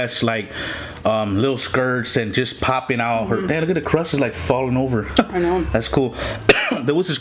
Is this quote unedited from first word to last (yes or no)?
yes